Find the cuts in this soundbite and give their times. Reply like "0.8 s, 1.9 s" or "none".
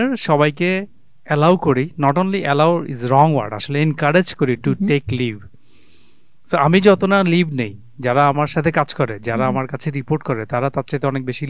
none